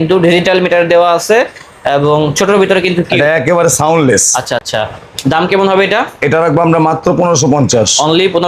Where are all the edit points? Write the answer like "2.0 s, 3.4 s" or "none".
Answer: none